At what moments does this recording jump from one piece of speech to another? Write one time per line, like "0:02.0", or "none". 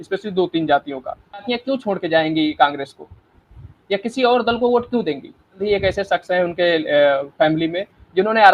0:01.5
0:05.6